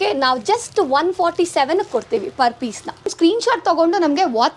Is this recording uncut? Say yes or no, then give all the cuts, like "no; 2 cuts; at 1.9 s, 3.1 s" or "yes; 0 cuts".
no; 1 cut; at 3.1 s